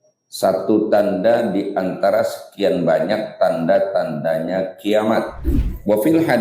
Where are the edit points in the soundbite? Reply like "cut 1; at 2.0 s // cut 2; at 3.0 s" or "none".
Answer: cut 1; at 5.4 s